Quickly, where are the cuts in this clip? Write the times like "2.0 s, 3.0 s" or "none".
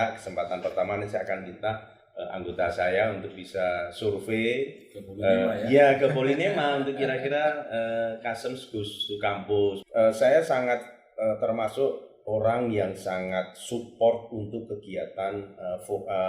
9.8 s

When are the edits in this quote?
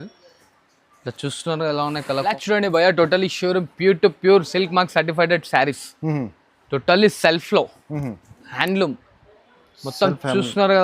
2.4 s

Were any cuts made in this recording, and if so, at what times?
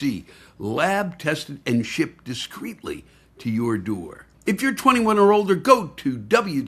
4.2 s

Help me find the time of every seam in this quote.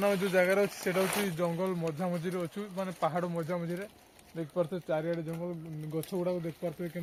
none

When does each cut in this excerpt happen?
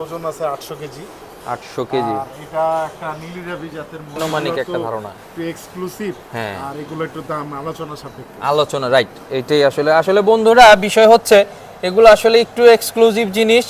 4.2 s

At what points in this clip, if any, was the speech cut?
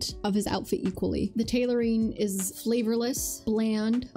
1.3 s

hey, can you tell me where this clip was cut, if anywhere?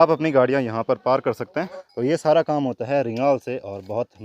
1.7 s

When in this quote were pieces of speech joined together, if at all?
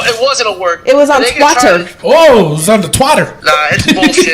1.9 s, 3.4 s

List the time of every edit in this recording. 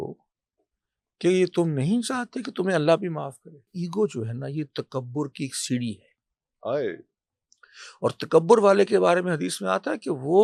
3.7 s

